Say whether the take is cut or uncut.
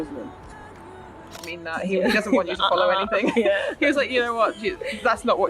cut